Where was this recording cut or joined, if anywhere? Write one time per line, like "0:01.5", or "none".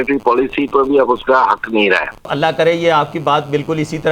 0:02.3